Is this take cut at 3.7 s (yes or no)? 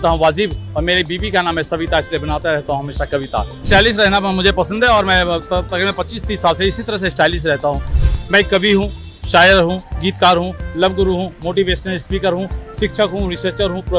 yes